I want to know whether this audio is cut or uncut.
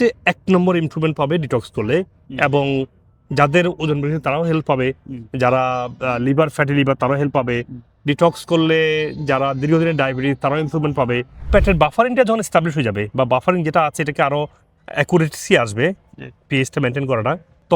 cut